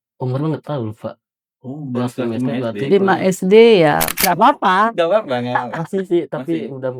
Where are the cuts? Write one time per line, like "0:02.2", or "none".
0:04.2